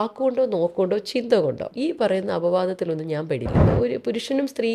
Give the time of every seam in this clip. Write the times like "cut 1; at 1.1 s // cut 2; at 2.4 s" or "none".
cut 1; at 1.7 s // cut 2; at 3.6 s